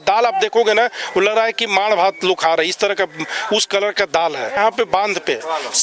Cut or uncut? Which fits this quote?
cut